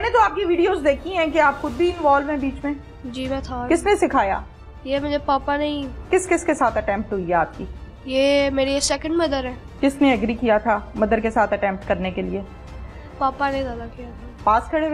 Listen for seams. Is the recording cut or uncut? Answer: cut